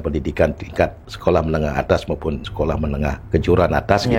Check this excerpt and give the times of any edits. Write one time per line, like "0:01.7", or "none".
0:01.1
0:02.5
0:03.2